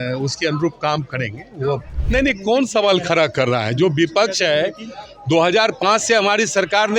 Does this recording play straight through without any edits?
no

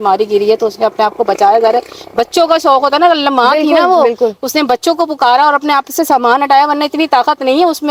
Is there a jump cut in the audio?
no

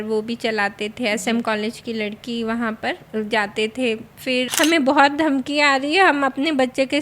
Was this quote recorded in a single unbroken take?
no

